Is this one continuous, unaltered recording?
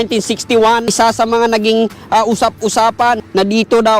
no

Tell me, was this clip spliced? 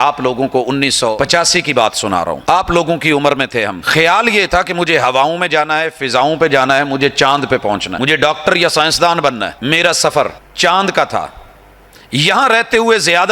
yes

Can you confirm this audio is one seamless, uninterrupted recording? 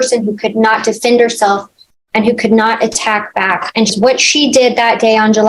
no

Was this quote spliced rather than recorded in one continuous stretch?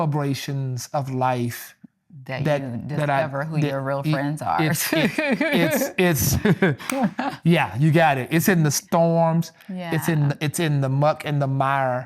no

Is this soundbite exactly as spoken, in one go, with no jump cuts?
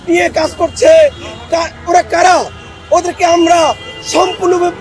yes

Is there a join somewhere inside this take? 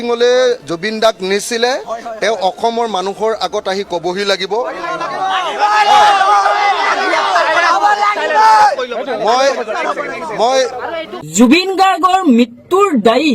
yes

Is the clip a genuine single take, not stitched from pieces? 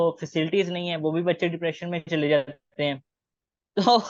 yes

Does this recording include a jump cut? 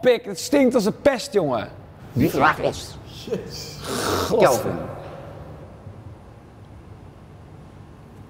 no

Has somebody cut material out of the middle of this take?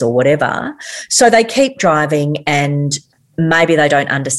no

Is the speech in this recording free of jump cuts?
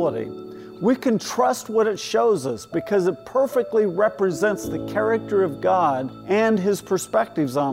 no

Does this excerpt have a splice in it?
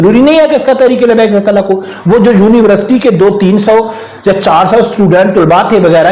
no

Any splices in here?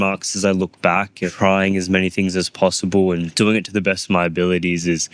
yes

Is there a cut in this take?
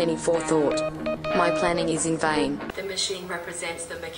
no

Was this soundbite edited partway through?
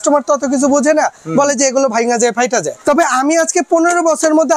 yes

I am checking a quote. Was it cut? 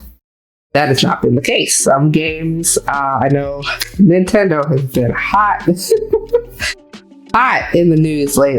no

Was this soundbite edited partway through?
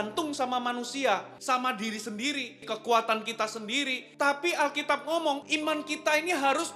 yes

